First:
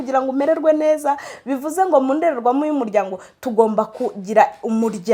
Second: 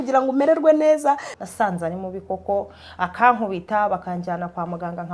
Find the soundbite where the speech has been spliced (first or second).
second